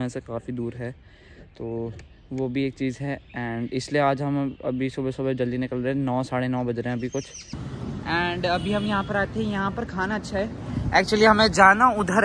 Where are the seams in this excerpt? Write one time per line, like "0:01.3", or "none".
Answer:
0:07.7